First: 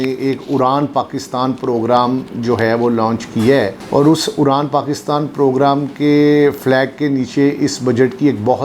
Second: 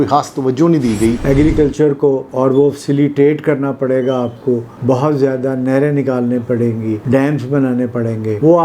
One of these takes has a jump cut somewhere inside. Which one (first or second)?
second